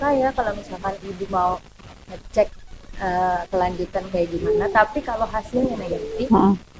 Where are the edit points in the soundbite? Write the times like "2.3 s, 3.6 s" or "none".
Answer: none